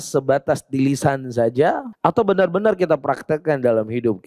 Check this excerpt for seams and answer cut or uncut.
cut